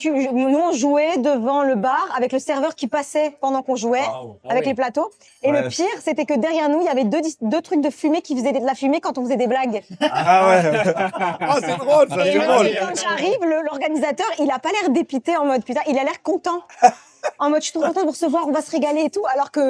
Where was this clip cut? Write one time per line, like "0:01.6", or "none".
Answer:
none